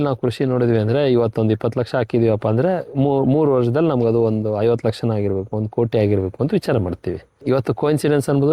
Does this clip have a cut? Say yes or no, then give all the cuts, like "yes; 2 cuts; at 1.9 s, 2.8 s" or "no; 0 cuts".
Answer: yes; 1 cut; at 7.3 s